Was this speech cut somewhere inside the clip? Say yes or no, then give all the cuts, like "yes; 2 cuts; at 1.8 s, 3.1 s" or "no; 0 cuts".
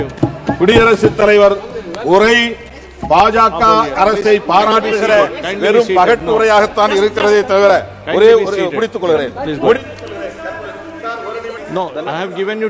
yes; 1 cut; at 11.6 s